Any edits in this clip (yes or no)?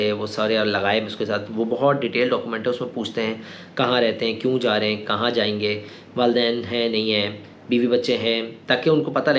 no